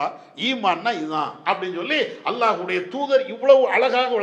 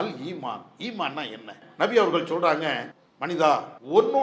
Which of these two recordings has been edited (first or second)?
second